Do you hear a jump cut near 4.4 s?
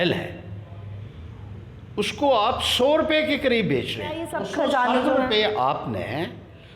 yes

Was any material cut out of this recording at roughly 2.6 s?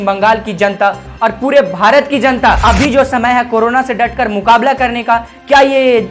yes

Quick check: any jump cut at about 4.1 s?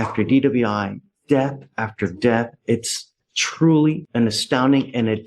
no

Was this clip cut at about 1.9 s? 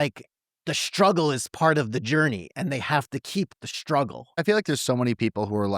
no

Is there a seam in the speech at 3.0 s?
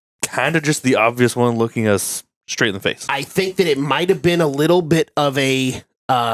yes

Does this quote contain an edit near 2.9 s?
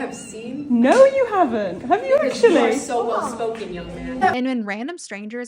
no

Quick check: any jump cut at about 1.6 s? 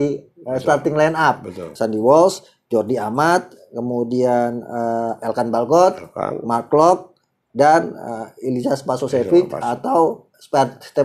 yes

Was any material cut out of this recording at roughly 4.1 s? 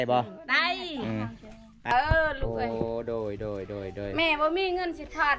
no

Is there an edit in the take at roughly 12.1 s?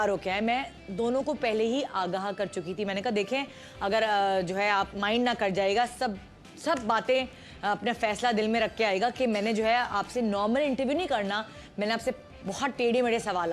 no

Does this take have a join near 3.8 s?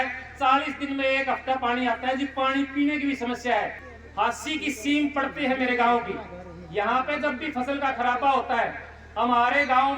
yes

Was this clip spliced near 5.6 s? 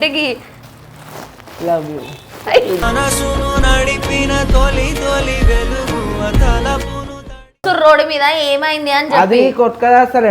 no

